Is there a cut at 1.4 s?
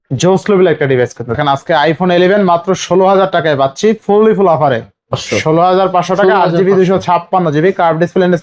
yes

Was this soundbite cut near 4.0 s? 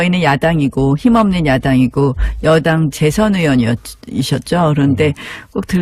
yes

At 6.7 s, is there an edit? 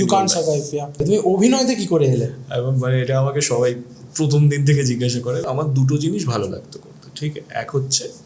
no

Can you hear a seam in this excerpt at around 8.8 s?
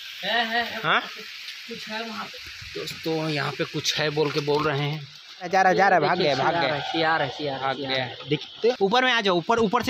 yes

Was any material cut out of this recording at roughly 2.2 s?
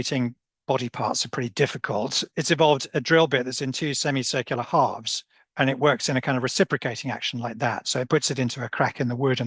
yes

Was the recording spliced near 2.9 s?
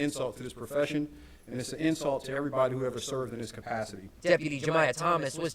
no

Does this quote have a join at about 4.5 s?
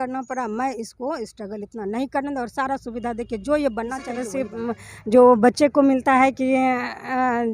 yes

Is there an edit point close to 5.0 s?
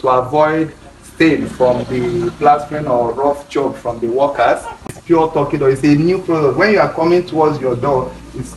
yes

